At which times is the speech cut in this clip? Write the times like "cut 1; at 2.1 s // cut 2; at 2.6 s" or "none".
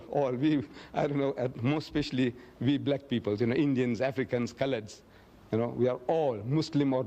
cut 1; at 1.9 s